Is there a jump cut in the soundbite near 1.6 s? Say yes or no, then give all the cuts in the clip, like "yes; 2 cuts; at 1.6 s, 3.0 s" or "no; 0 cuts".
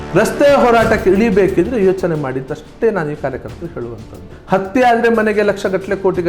no; 1 cut; at 4.3 s